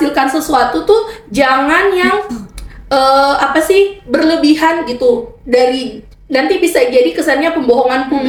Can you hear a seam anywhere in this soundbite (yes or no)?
no